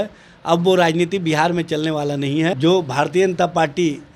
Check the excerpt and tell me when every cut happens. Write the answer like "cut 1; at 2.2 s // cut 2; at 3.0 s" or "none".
cut 1; at 2.6 s